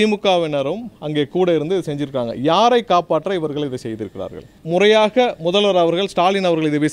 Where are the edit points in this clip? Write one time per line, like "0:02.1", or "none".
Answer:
0:04.5